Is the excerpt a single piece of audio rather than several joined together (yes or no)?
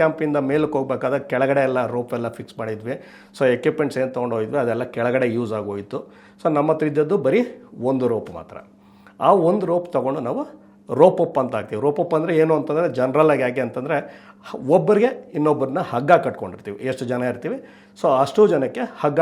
yes